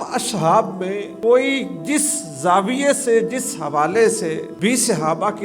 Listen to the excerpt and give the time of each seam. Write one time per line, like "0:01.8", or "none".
0:01.0
0:04.5